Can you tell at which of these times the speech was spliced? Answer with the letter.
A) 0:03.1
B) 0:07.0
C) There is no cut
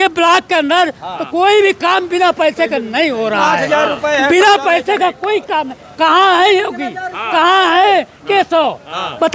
C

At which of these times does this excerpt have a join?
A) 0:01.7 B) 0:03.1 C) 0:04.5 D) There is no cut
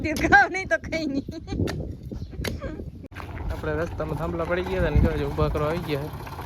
B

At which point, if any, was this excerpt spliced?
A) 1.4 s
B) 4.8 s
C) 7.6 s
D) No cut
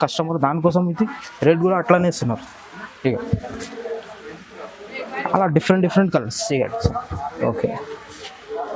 D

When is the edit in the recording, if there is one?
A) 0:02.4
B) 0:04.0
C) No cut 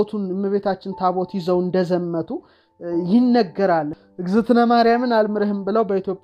B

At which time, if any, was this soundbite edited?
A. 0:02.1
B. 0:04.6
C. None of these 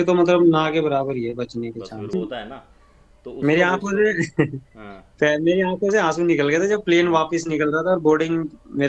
A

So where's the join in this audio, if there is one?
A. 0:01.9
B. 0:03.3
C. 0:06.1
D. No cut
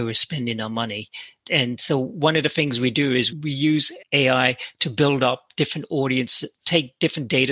B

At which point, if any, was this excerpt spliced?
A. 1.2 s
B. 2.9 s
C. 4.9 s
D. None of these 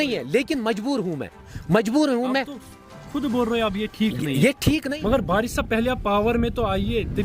C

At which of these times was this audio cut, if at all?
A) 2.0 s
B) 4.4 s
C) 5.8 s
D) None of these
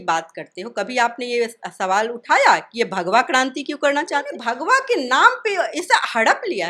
B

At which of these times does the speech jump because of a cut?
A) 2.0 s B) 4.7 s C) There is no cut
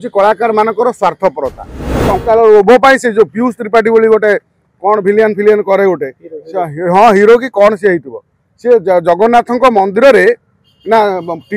A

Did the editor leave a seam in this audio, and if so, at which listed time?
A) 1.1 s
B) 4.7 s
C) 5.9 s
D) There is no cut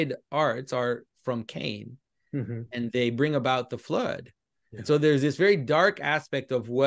A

